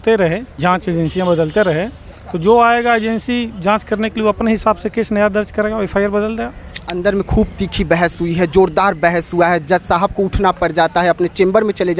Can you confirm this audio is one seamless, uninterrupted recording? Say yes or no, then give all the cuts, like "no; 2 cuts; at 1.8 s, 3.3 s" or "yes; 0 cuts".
no; 1 cut; at 6.7 s